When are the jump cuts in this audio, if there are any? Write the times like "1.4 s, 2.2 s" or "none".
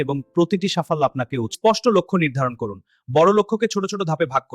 1.5 s